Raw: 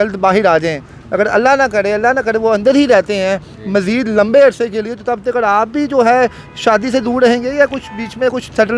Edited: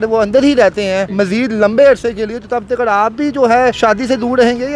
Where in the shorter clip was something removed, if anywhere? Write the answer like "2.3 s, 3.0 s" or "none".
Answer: 1.1 s, 3.8 s

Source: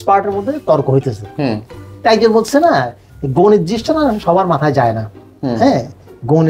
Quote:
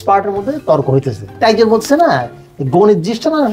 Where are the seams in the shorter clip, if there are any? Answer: 1.2 s

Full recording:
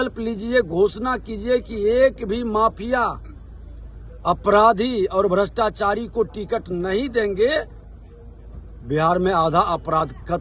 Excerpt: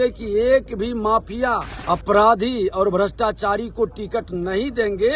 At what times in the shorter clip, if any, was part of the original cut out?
1.7 s

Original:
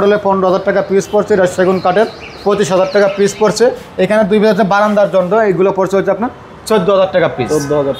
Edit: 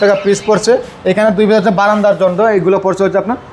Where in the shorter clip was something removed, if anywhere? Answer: none

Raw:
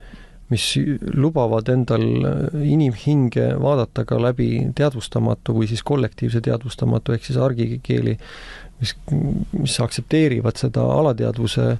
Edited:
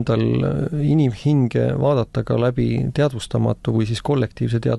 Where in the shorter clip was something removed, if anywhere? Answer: none

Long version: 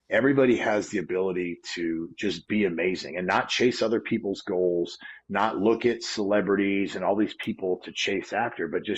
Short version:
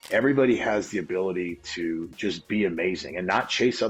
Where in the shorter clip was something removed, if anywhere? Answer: none

